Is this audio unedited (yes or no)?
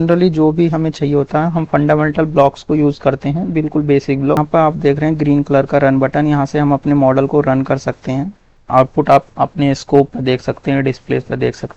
no